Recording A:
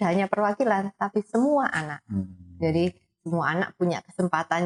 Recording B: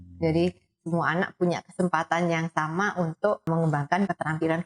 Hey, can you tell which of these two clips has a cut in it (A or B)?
B